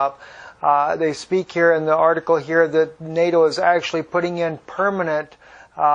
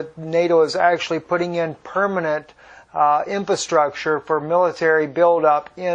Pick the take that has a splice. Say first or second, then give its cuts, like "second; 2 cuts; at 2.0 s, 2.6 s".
first; 1 cut; at 1.5 s